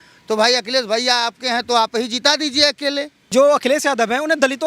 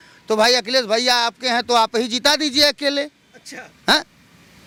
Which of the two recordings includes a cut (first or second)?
first